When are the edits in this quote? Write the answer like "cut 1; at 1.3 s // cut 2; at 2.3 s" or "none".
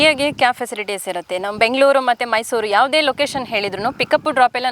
none